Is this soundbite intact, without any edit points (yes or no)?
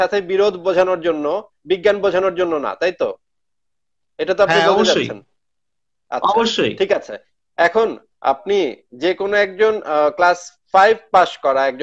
yes